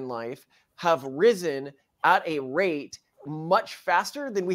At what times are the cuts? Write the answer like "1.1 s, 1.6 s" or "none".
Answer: 3.2 s